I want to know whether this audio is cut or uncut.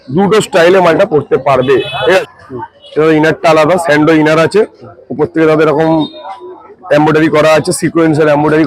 cut